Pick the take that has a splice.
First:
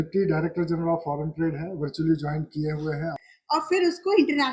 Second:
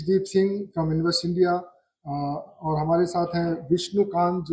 first; 1 cut; at 3.2 s

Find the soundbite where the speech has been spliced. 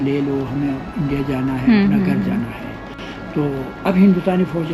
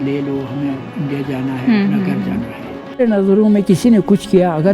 second; 1 cut; at 3.0 s

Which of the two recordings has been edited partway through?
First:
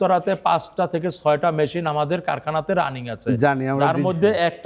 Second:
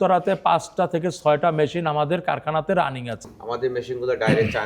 second; 1 cut; at 3.2 s

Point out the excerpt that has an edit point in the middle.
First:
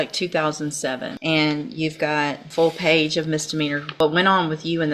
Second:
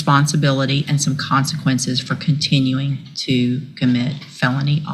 first; 3 cuts; at 1.1 s, 2.4 s, 3.9 s

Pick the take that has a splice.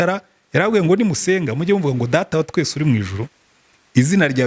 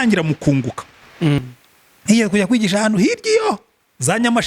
second; 1 cut; at 1.4 s

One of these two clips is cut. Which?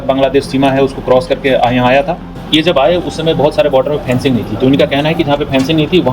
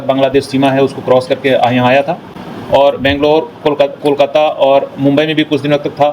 first; 1 cut; at 2.4 s

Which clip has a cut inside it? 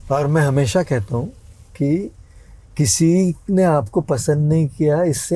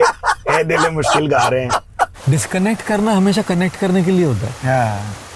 second; 1 cut; at 2.2 s

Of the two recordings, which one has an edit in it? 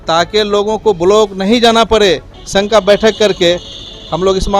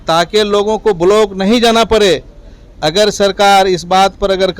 first; 1 cut; at 2.3 s

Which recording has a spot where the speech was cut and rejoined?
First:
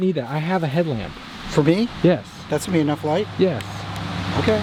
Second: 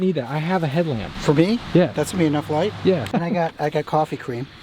second; 3 cuts; at 1.1 s, 1.9 s, 3.1 s

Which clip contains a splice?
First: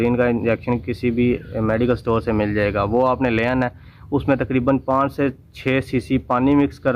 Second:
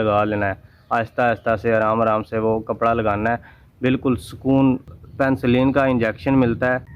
second; 1 cut; at 4.9 s

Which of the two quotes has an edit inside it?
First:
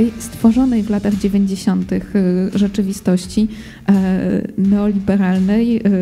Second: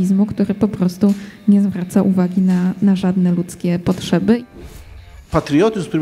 second; 1 cut; at 4.7 s

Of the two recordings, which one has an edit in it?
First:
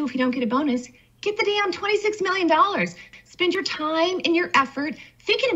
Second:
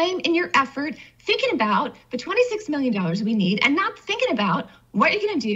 first; 1 cut; at 3.1 s

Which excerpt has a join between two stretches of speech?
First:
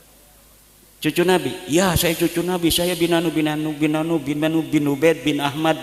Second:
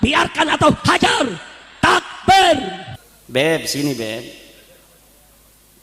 second; 1 cut; at 2.8 s

